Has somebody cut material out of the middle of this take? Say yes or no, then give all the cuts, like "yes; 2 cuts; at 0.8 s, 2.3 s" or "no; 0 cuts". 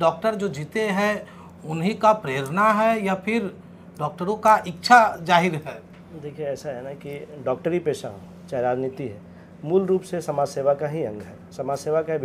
no; 0 cuts